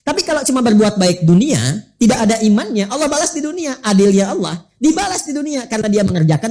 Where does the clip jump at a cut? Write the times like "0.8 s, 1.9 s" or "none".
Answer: none

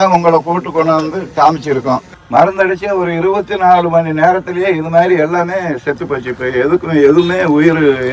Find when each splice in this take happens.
2.1 s

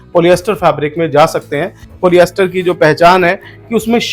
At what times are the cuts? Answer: 1.9 s

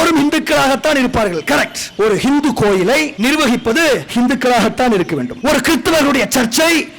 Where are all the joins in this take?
1.8 s, 3.1 s, 4.1 s, 5.3 s

